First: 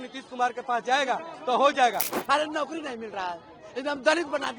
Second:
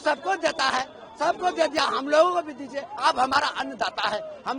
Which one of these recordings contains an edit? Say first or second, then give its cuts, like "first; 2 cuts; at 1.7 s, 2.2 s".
first; 1 cut; at 2.2 s